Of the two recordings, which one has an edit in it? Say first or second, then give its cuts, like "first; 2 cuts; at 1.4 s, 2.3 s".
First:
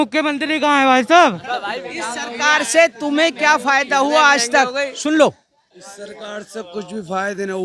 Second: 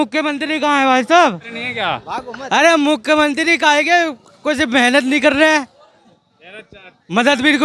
first; 1 cut; at 1.4 s